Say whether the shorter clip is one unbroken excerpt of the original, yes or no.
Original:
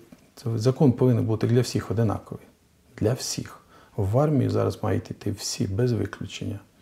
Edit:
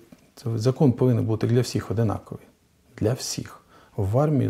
yes